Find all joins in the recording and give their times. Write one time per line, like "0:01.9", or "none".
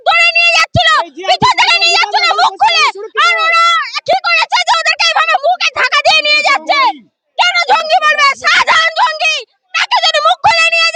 none